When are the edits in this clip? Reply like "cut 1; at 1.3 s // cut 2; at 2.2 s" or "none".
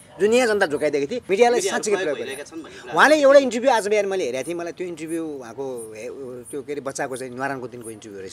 cut 1; at 1.2 s